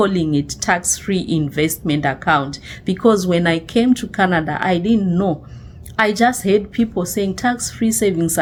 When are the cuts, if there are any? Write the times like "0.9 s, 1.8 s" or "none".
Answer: none